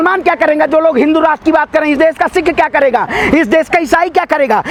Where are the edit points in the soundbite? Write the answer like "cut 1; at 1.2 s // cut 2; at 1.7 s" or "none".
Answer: none